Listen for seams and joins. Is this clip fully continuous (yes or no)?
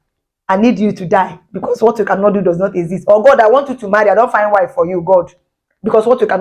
yes